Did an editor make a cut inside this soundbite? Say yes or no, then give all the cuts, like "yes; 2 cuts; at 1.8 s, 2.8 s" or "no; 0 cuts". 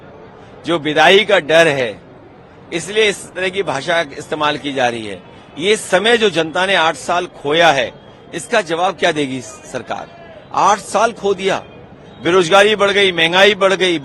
no; 0 cuts